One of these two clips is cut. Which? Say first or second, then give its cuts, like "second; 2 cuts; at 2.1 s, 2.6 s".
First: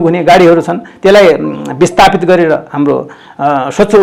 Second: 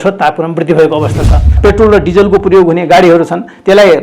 second; 1 cut; at 1.5 s